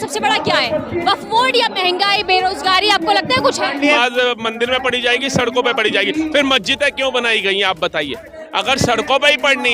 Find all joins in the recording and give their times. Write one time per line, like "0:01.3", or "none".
0:03.8